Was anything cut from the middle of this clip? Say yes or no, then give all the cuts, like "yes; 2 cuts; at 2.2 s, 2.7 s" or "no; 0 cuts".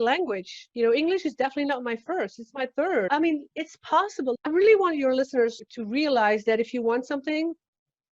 yes; 2 cuts; at 3.1 s, 4.5 s